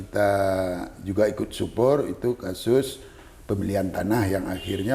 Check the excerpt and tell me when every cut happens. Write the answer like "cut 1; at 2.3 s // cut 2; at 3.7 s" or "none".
none